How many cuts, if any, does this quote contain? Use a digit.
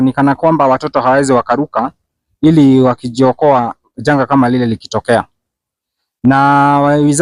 0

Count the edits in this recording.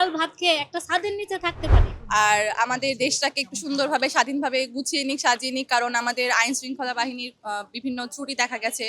1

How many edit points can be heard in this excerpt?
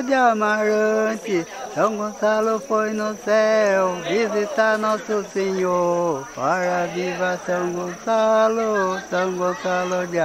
0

